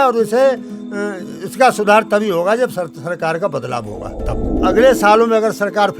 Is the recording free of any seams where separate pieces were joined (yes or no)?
no